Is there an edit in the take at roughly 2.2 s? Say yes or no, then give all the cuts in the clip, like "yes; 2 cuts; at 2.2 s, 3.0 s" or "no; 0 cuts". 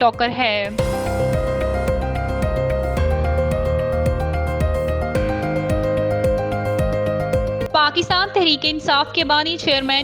no; 2 cuts; at 0.8 s, 7.6 s